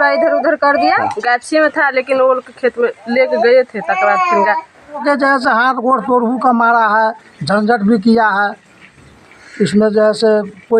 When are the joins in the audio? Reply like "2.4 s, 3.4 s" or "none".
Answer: 1.1 s, 5.0 s